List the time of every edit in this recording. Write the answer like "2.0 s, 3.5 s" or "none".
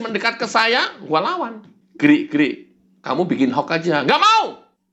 none